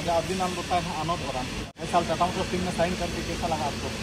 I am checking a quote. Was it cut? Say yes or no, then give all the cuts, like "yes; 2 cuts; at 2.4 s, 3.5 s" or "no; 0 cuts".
yes; 1 cut; at 1.6 s